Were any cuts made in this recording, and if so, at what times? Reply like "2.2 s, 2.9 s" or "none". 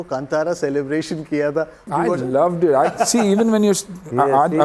1.8 s